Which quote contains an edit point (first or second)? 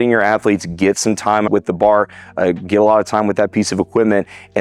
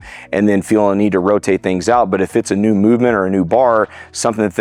first